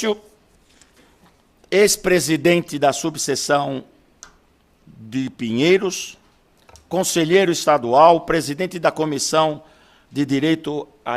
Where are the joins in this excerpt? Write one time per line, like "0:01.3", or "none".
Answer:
0:10.1